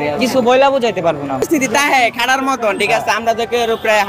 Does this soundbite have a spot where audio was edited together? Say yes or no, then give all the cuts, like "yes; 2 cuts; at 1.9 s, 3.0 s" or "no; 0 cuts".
yes; 1 cut; at 1.4 s